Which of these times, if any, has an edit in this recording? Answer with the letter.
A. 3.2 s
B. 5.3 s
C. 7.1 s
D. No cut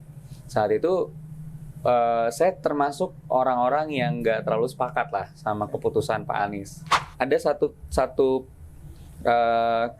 C